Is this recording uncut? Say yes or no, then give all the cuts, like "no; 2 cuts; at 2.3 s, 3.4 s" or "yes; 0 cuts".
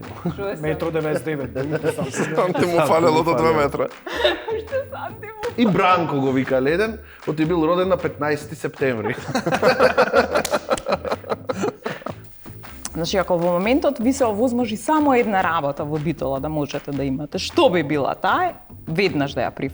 no; 1 cut; at 12.3 s